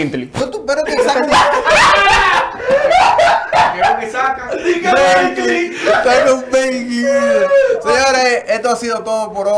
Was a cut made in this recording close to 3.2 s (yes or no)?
no